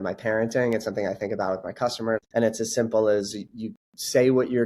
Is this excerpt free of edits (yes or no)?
no